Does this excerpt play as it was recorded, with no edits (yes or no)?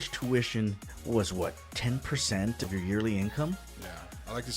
no